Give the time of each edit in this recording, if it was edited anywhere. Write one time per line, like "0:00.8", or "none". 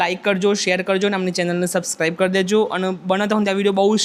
none